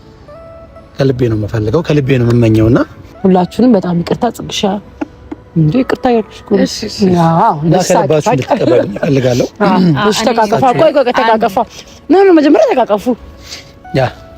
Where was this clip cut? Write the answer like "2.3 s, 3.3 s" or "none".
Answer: 3.0 s

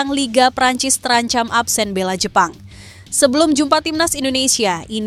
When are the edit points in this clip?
none

